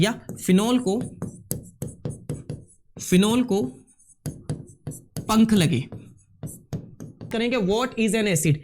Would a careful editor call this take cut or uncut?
cut